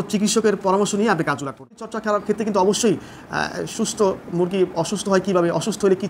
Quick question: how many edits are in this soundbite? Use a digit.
1